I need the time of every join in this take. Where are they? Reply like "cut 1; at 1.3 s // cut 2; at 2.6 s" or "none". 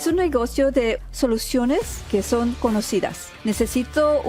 cut 1; at 1.0 s // cut 2; at 2.0 s // cut 3; at 3.3 s